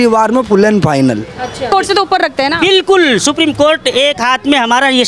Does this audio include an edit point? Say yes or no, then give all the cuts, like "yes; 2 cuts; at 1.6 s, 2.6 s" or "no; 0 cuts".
yes; 1 cut; at 1.7 s